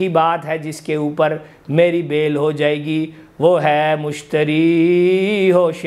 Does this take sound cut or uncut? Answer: uncut